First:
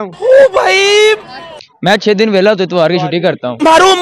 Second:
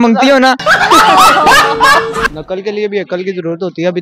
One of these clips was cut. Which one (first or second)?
second